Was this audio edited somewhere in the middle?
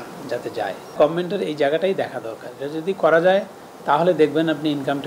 yes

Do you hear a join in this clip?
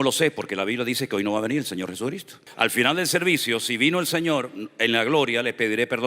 yes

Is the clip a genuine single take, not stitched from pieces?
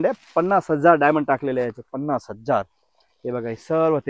yes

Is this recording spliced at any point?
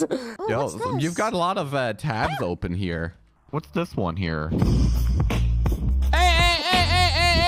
yes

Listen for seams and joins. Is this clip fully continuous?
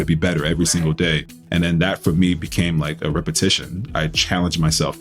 no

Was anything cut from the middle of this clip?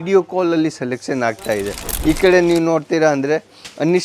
yes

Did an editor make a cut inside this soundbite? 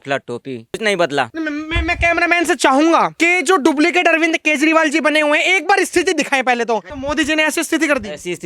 yes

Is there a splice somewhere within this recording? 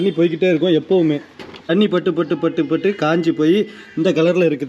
yes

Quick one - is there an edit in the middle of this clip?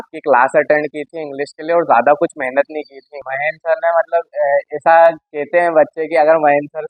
yes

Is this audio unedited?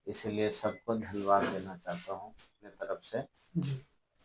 no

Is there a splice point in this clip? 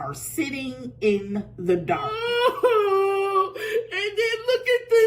yes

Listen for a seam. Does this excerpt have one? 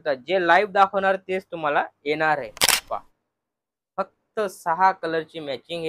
yes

